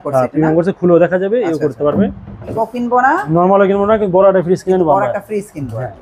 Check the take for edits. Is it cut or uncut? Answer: cut